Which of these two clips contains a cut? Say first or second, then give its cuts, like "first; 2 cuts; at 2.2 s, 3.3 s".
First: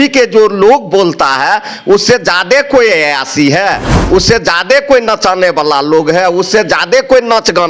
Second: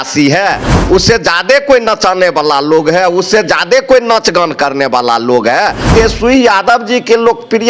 second; 1 cut; at 5.9 s